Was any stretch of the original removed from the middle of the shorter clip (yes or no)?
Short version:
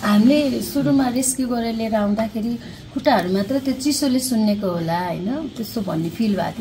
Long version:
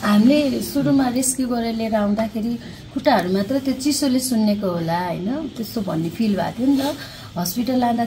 no